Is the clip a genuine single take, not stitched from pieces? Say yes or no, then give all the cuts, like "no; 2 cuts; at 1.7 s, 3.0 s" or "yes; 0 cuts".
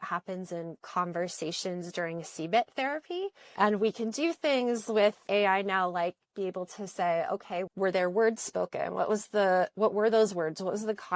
no; 3 cuts; at 3.6 s, 5.2 s, 7.7 s